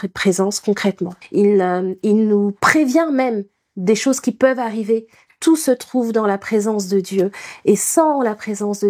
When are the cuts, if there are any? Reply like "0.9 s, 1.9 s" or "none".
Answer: 1.1 s

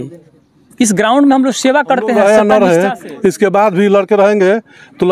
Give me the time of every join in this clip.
2.2 s

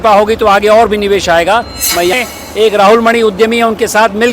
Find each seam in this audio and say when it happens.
2.1 s

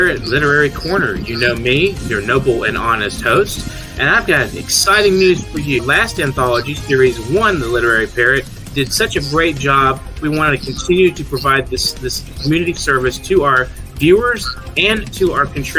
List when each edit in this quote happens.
none

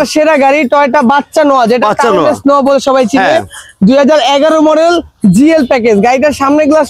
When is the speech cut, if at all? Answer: none

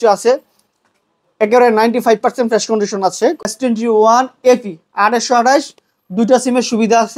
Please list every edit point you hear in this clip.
3.5 s

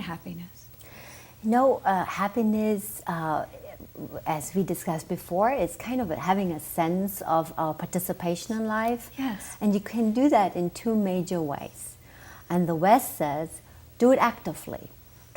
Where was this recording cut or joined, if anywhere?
3.3 s

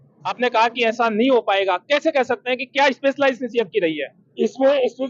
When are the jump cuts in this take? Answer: none

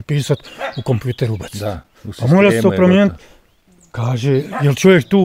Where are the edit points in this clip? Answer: none

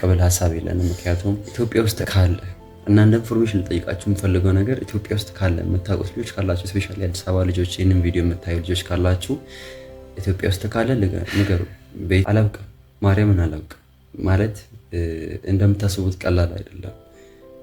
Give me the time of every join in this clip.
1.5 s, 12.2 s

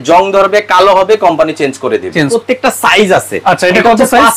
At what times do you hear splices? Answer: 2.3 s

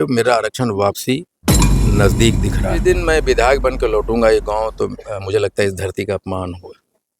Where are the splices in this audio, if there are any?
2.8 s

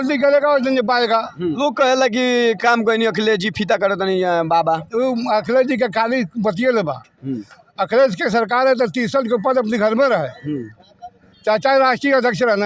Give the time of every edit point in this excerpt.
1.6 s

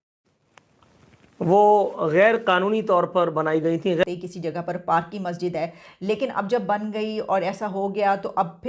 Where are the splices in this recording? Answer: 4.0 s

